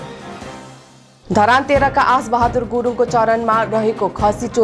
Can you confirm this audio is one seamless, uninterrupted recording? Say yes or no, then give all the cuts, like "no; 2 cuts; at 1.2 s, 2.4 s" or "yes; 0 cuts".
no; 1 cut; at 1.0 s